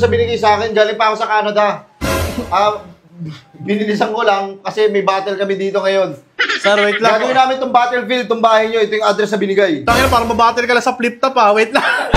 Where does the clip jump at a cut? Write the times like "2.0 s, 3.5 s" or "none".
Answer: none